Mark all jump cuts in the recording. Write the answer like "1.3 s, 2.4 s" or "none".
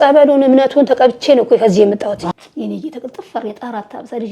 2.3 s